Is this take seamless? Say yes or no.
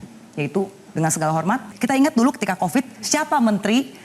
no